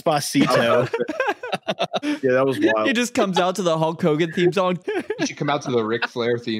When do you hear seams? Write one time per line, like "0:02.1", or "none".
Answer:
0:04.8